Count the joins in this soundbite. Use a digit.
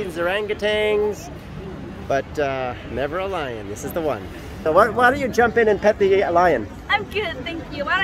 1